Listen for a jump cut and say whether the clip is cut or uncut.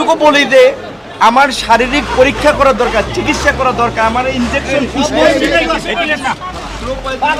uncut